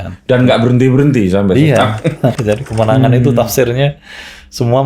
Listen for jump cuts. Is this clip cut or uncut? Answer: cut